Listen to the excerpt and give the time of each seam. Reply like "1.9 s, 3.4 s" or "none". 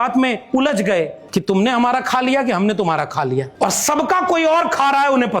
1.2 s, 3.5 s